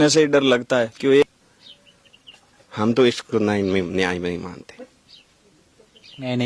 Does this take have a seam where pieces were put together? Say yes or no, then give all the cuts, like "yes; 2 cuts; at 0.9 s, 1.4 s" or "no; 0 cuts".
yes; 1 cut; at 1.2 s